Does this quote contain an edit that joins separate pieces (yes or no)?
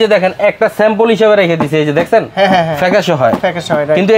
no